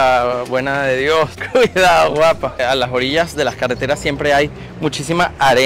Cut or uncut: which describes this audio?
cut